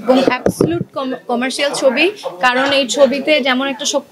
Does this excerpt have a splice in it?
no; 0 cuts

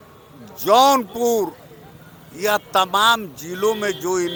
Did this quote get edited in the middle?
no; 0 cuts

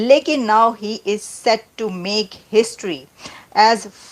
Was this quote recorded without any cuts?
yes; 0 cuts

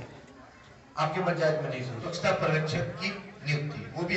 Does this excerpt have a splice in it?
yes; 1 cut; at 2.0 s

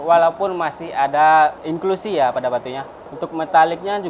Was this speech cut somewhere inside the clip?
yes; 1 cut; at 1.6 s

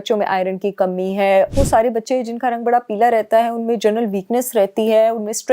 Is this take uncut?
no; 1 cut; at 1.5 s

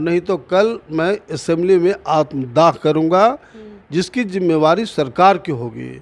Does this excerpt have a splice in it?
no; 0 cuts

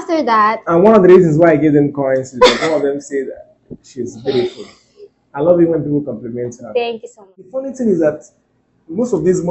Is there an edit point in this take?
yes; 1 cut; at 7.6 s

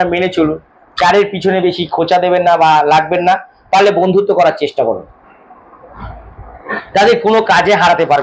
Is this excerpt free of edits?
yes; 0 cuts

